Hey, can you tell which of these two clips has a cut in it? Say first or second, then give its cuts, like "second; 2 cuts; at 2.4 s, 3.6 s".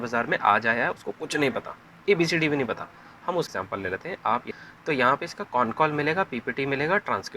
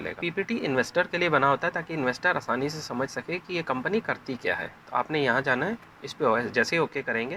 first; 2 cuts; at 3.5 s, 4.5 s